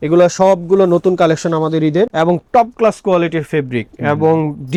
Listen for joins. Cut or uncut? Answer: uncut